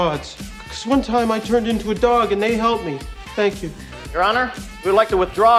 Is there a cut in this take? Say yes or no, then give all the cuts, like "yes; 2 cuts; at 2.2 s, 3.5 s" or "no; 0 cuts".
no; 0 cuts